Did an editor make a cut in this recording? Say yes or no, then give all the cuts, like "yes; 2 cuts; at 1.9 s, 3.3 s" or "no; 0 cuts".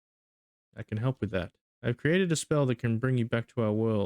yes; 1 cut; at 1.6 s